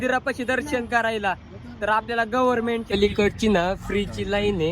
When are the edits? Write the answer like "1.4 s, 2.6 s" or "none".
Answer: 2.9 s